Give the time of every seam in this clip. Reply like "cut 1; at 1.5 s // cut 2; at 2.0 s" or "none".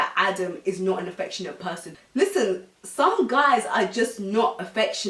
cut 1; at 1.9 s